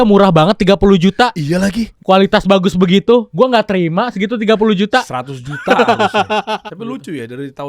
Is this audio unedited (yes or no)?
no